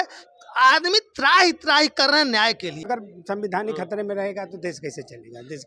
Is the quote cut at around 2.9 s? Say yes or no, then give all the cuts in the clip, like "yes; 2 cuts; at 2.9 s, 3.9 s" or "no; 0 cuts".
yes; 1 cut; at 2.9 s